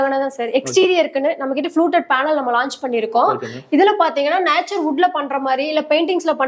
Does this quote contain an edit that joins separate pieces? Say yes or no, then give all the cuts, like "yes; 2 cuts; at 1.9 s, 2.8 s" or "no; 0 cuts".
no; 0 cuts